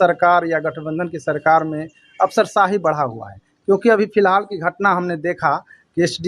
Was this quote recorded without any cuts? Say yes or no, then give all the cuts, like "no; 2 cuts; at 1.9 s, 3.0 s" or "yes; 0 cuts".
yes; 0 cuts